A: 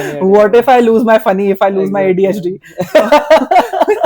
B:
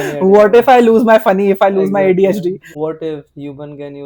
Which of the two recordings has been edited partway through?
B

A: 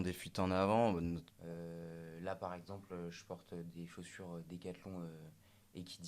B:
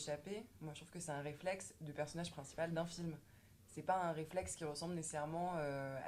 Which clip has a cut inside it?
A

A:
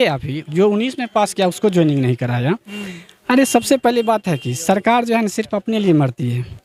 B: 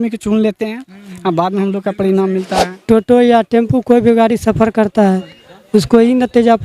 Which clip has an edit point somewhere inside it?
B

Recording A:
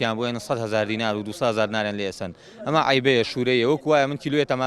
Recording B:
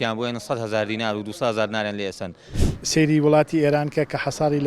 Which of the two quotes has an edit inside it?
B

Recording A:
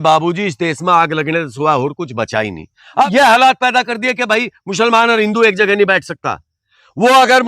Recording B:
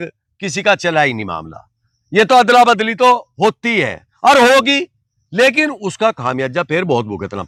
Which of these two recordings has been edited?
A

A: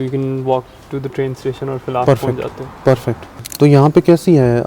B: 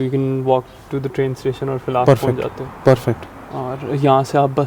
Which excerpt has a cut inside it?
A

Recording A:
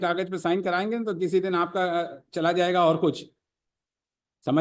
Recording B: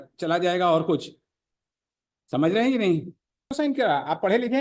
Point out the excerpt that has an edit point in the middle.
B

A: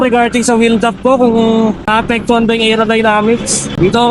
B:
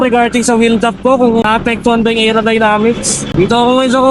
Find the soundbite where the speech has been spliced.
B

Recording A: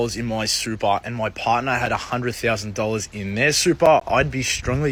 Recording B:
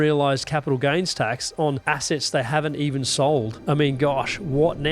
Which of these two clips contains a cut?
B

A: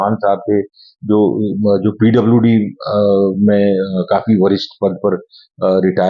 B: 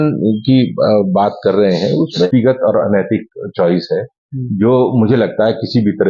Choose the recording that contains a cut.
B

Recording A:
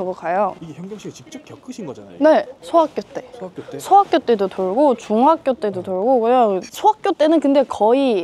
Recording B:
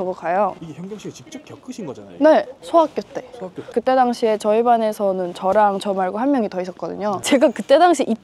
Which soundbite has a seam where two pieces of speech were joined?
B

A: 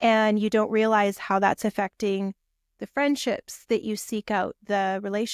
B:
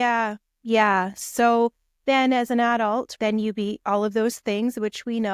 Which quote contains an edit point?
B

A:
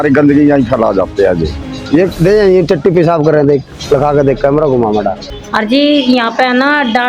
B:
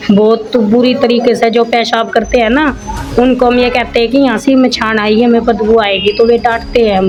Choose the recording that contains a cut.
A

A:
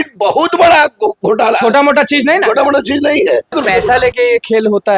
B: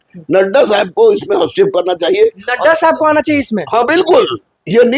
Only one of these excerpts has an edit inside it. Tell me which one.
A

